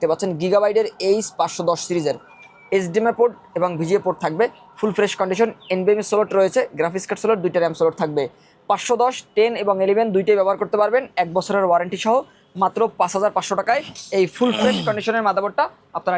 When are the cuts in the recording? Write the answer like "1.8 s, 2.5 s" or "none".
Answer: none